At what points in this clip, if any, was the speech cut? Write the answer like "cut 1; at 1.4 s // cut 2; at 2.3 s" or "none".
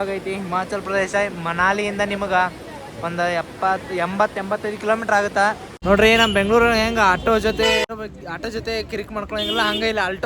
cut 1; at 5.7 s // cut 2; at 7.8 s